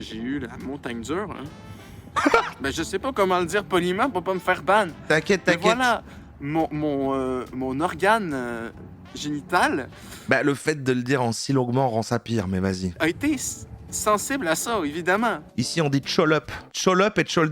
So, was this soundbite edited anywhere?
yes; 3 cuts; at 12.9 s, 15.4 s, 16.6 s

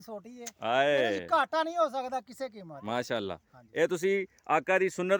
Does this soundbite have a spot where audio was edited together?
no; 0 cuts

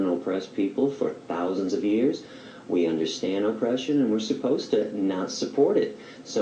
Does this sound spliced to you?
yes; 1 cut; at 2.4 s

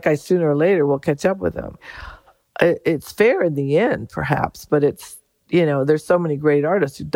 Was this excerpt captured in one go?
yes; 0 cuts

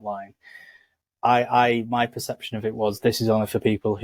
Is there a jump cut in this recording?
no; 0 cuts

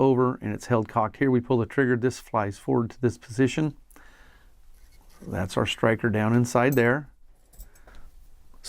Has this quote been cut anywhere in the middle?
no; 0 cuts

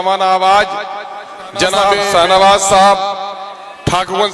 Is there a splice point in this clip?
yes; 1 cut; at 1.8 s

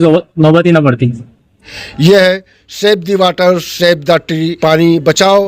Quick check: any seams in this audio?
yes; 2 cuts; at 1.7 s, 4.5 s

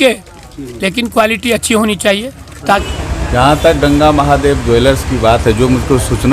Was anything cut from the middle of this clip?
yes; 1 cut; at 2.9 s

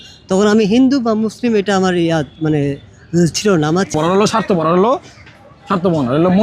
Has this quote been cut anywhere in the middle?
yes; 1 cut; at 3.9 s

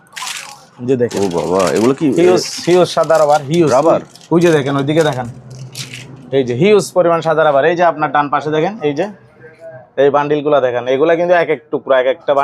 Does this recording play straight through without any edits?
yes; 0 cuts

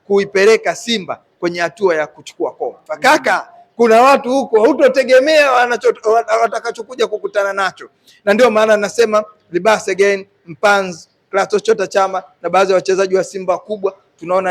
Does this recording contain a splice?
yes; 1 cut; at 2.9 s

